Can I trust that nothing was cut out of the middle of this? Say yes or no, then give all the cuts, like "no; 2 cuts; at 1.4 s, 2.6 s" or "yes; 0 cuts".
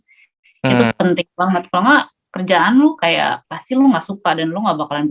yes; 0 cuts